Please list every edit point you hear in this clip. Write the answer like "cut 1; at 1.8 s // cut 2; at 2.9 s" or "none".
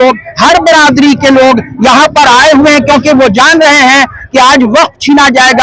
none